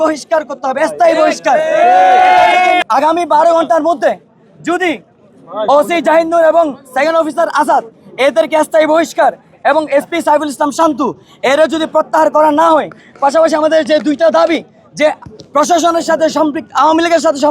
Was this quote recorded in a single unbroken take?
no; 1 cut; at 2.8 s

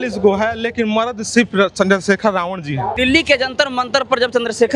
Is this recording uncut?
no; 1 cut; at 2.9 s

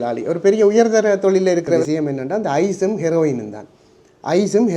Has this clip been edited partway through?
yes; 1 cut; at 1.8 s

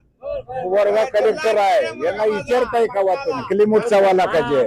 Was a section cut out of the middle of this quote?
yes; 1 cut; at 3.5 s

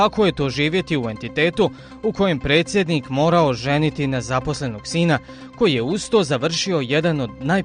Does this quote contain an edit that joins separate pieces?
yes; 1 cut; at 4.3 s

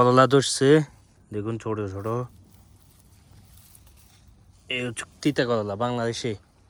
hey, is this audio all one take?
yes; 0 cuts

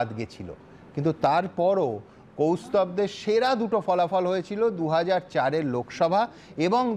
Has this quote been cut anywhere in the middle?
no; 0 cuts

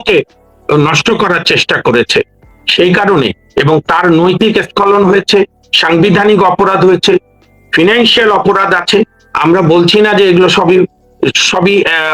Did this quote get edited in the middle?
no; 0 cuts

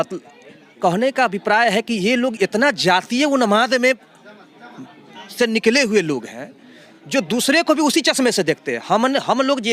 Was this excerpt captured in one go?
yes; 0 cuts

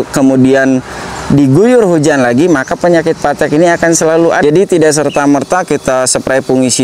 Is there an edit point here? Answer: yes; 1 cut; at 4.4 s

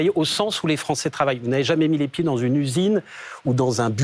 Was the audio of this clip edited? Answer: no; 0 cuts

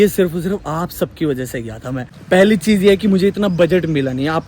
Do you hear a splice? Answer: yes; 1 cut; at 2.2 s

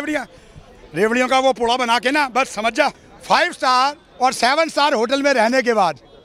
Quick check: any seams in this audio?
yes; 1 cut; at 3.1 s

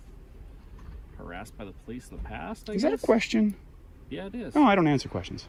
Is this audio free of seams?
yes; 0 cuts

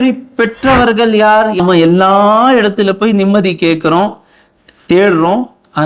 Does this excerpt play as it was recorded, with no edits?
no; 1 cut; at 1.6 s

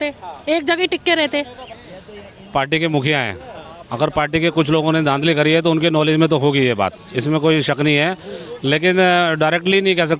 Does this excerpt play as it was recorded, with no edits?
no; 1 cut; at 1.8 s

